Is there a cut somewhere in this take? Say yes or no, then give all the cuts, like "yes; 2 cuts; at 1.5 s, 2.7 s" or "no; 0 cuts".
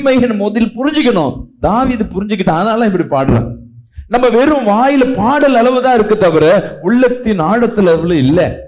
no; 0 cuts